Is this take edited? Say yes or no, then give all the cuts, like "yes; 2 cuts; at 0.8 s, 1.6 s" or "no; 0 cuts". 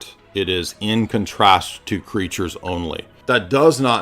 yes; 1 cut; at 3.1 s